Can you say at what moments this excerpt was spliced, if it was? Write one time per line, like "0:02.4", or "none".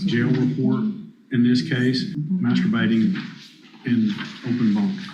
0:02.1